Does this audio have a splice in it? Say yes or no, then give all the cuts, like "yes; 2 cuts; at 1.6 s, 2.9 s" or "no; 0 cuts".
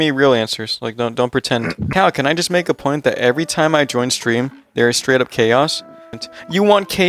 yes; 2 cuts; at 1.8 s, 6.1 s